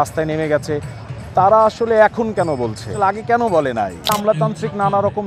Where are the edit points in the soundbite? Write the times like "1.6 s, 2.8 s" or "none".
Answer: 4.0 s

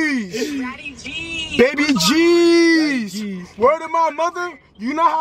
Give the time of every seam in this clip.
none

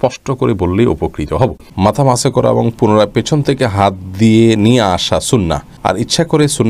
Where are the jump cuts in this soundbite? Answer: 1.6 s, 5.7 s

